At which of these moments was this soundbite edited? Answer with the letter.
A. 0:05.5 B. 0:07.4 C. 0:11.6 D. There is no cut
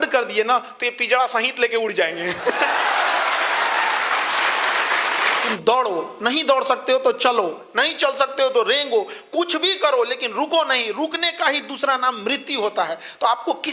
A